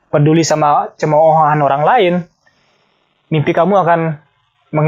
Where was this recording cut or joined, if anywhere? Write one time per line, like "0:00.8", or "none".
none